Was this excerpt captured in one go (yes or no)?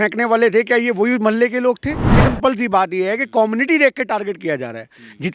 no